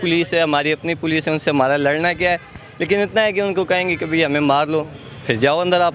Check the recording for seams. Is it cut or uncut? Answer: uncut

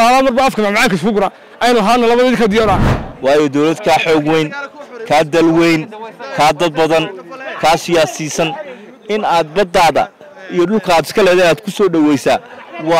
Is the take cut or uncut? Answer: cut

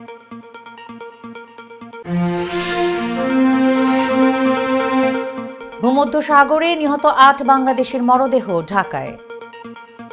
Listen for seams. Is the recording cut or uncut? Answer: cut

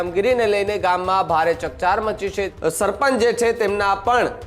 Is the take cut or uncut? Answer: cut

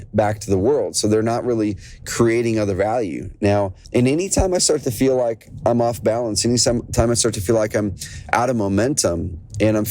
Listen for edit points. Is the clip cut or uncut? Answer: cut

